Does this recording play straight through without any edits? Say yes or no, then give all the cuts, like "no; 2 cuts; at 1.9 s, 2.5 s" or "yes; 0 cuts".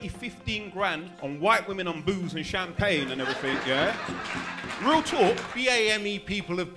no; 2 cuts; at 1.1 s, 5.5 s